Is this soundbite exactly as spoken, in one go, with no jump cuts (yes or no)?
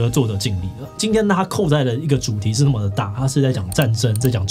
yes